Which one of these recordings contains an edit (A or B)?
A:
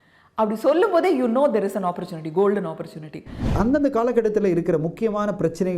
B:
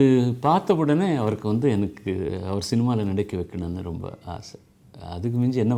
A